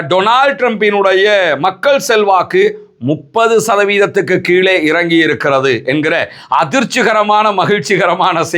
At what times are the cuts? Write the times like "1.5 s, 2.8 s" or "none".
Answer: none

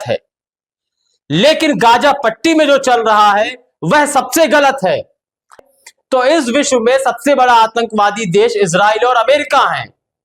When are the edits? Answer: 5.6 s

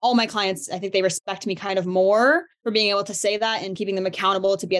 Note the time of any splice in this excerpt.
2.5 s, 3.8 s

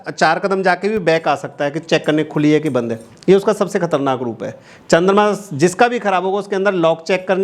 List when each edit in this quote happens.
none

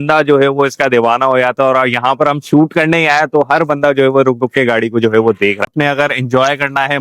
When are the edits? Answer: 5.7 s

